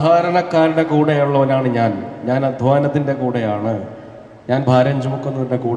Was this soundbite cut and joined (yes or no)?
no